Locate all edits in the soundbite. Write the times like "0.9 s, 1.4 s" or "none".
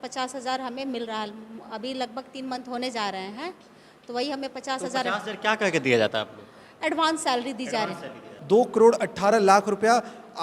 8.3 s